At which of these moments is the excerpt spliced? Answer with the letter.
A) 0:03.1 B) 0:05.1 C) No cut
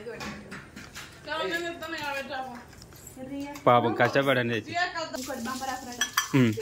B